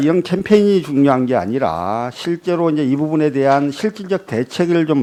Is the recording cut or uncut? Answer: uncut